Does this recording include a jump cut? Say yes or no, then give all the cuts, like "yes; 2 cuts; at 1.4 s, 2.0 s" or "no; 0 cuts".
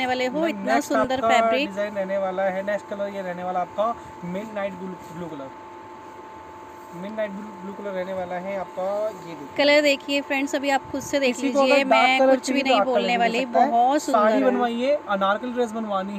no; 0 cuts